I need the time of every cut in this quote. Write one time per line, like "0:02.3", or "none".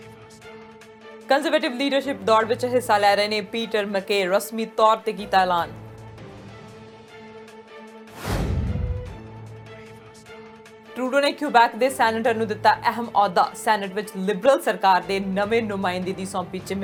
none